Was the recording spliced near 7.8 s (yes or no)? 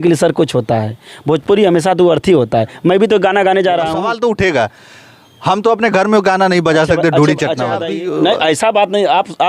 yes